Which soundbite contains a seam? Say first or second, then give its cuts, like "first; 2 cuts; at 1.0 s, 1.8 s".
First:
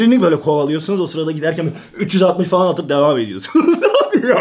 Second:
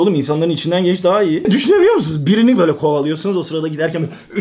second; 1 cut; at 1.5 s